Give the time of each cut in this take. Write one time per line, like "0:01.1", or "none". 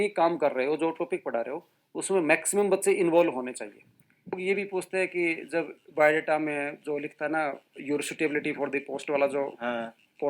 0:04.4